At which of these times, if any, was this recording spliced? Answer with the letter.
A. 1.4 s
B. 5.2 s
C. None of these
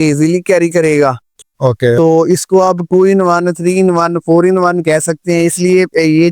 A